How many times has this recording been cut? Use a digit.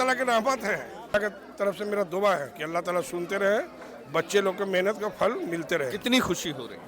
1